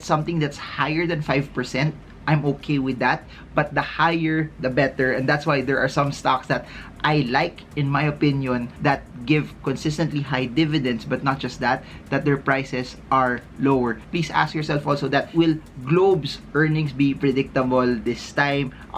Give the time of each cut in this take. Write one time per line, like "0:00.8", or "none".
none